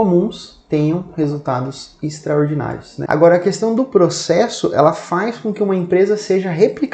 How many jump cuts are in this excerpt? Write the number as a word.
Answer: one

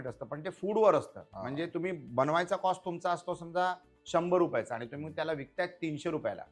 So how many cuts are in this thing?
zero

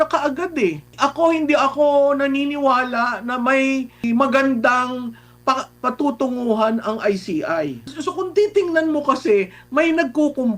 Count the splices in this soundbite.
three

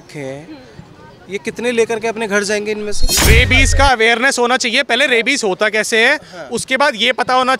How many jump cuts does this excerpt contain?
one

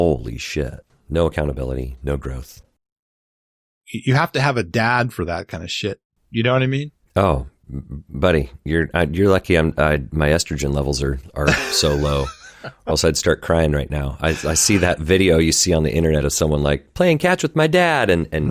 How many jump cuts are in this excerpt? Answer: one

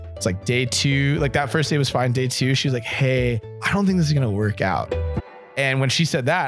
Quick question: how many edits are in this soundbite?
one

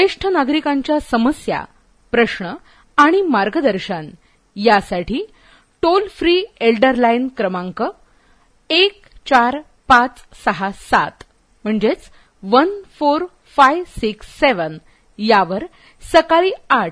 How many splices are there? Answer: zero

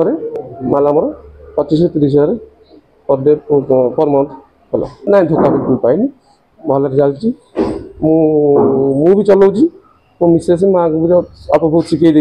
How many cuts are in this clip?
one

